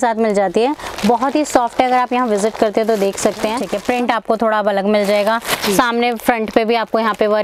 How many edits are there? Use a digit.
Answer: 1